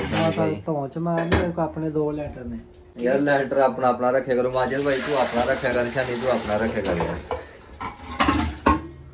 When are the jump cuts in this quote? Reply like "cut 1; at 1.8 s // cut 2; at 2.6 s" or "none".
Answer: none